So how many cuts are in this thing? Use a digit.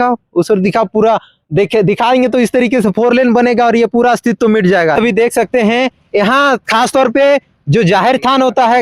1